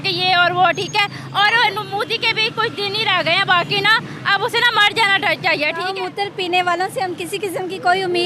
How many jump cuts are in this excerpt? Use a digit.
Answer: 1